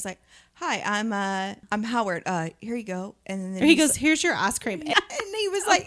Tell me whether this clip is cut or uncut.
cut